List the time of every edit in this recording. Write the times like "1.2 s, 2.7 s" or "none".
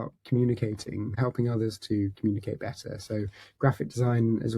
1.1 s